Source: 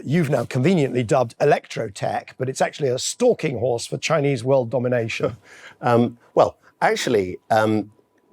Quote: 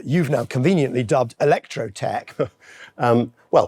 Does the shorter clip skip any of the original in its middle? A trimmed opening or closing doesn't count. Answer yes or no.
yes